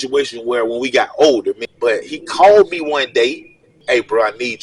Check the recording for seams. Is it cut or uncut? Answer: cut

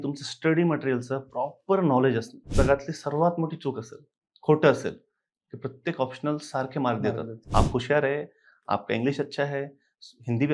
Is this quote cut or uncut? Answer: cut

